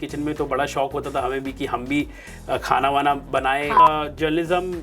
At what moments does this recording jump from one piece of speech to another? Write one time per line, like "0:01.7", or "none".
0:03.8

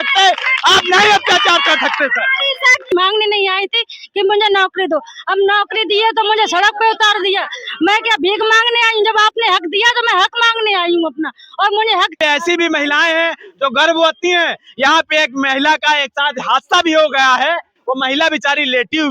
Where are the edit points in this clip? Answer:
0:02.9
0:12.2

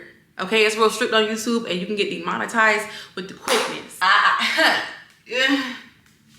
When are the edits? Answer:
0:03.9

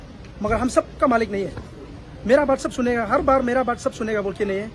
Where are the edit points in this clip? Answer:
none

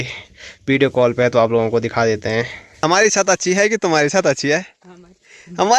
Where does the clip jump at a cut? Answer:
0:02.6

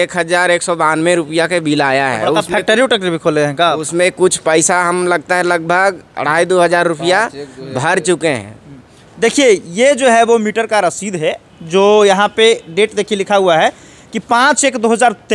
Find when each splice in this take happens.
none

